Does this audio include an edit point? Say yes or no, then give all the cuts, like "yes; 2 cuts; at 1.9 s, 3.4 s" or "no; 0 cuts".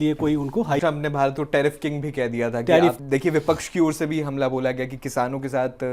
yes; 2 cuts; at 0.8 s, 3.0 s